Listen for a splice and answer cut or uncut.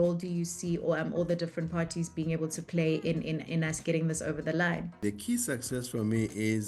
cut